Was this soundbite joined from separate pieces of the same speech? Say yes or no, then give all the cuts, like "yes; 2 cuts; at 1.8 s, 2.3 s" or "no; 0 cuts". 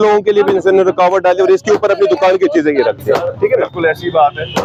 no; 0 cuts